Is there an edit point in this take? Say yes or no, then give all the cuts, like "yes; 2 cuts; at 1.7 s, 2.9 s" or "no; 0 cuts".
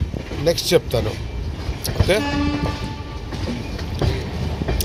no; 0 cuts